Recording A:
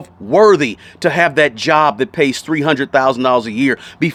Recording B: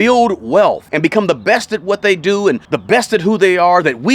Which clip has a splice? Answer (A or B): B